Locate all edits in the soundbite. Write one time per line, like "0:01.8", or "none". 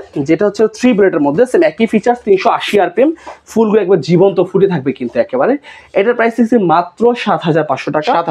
none